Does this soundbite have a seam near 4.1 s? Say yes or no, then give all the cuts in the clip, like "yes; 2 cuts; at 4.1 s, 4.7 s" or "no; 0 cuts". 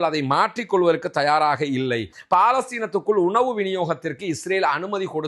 no; 1 cut; at 2.1 s